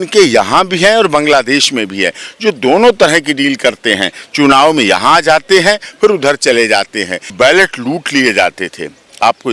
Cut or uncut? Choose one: cut